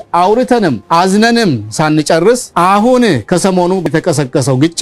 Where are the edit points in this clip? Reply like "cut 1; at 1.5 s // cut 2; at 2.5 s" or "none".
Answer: cut 1; at 0.8 s // cut 2; at 2.5 s // cut 3; at 3.9 s